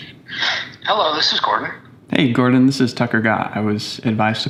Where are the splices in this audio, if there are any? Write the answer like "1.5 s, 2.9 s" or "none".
none